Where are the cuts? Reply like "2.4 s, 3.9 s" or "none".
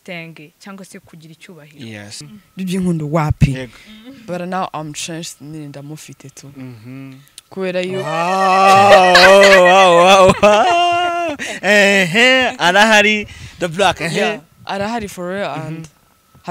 2.4 s

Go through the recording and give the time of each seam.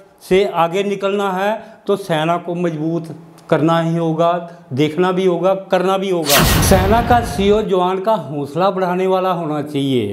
6.5 s

